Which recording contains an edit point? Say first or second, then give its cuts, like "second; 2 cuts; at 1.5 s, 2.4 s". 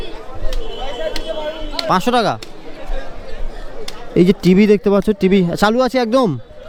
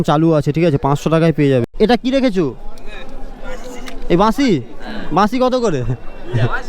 second; 1 cut; at 1.7 s